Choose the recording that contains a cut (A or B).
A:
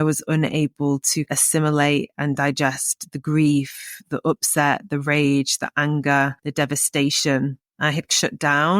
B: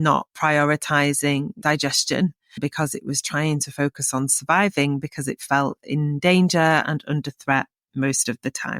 A